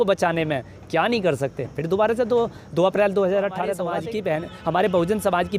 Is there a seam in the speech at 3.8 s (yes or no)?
yes